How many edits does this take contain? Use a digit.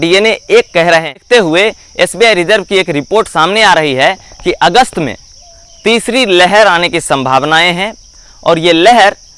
1